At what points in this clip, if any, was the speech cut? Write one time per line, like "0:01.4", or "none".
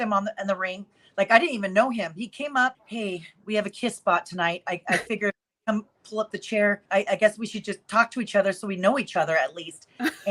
0:02.8
0:06.8